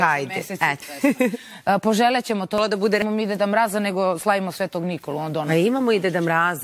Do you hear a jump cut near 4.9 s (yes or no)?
no